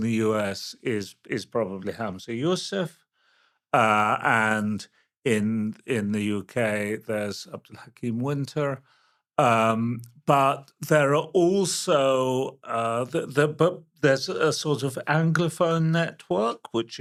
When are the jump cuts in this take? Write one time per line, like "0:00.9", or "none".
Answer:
none